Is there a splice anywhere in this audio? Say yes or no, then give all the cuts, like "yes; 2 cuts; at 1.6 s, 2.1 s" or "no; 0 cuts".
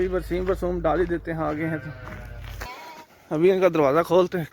yes; 1 cut; at 2.7 s